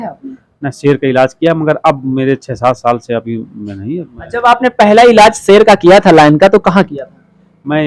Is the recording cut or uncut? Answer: uncut